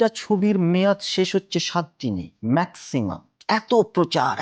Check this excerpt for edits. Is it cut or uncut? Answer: cut